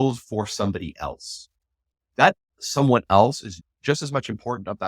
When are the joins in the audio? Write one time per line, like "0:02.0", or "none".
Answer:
0:03.6